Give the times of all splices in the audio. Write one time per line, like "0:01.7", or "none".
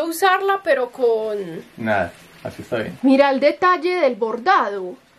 0:02.9

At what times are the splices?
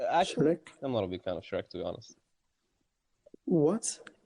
0:03.3

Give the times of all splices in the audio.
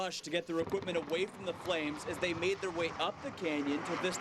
none

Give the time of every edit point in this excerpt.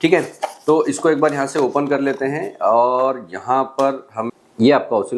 0:04.2

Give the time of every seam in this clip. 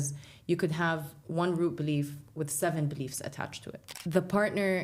0:03.8

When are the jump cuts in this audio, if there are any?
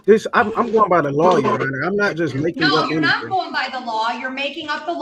none

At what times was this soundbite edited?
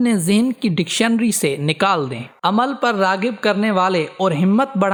none

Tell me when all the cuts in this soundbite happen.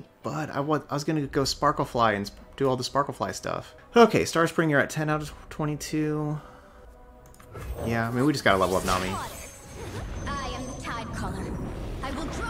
0:03.7

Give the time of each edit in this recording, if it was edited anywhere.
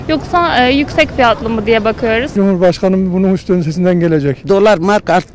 0:02.3
0:04.4

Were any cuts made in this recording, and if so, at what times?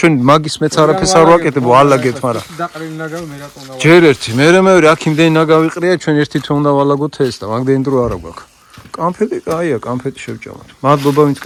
none

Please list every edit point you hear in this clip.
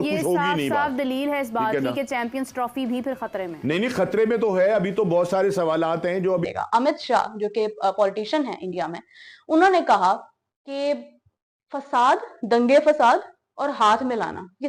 0:06.5

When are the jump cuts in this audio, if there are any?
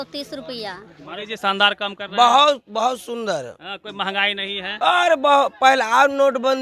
0:01.2

